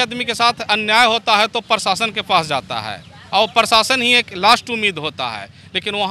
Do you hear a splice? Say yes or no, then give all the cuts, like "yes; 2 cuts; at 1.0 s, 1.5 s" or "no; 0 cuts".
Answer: no; 0 cuts